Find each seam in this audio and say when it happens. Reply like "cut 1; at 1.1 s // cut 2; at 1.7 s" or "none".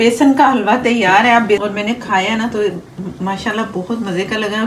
cut 1; at 1.6 s